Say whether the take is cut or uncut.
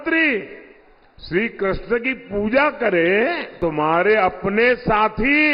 cut